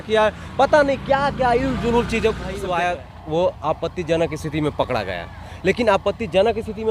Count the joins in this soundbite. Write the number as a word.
one